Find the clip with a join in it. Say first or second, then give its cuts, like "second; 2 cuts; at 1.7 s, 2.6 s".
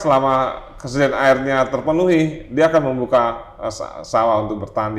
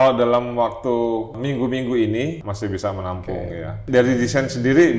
second; 3 cuts; at 1.3 s, 2.5 s, 3.8 s